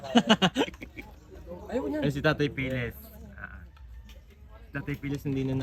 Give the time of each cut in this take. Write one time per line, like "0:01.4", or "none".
none